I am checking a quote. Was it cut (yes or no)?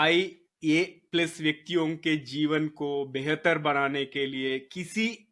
no